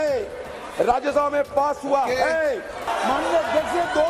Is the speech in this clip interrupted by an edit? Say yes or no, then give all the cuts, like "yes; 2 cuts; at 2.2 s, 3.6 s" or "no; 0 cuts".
yes; 1 cut; at 2.9 s